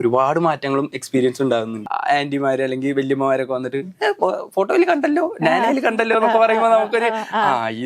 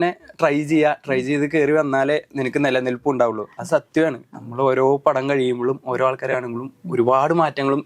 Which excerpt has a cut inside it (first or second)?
first